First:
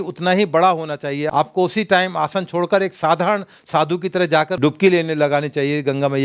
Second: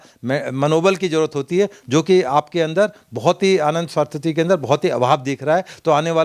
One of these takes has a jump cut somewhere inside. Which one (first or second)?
first